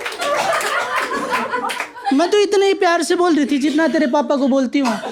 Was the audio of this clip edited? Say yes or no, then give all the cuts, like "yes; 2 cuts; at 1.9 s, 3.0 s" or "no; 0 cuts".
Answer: no; 0 cuts